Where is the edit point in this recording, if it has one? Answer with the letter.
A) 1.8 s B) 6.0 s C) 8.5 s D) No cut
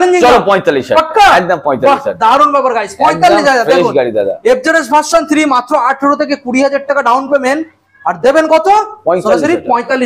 D